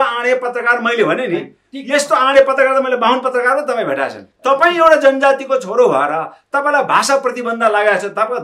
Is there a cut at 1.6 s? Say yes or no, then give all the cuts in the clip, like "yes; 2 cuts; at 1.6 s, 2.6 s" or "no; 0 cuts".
no; 1 cut; at 4.3 s